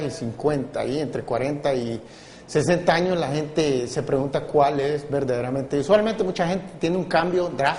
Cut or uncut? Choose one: cut